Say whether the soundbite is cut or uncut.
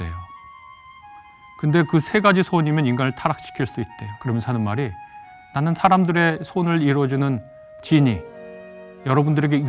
cut